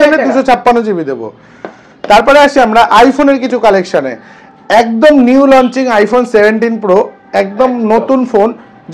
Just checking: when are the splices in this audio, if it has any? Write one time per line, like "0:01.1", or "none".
none